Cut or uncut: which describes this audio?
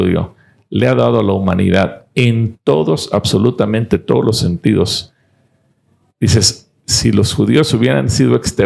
uncut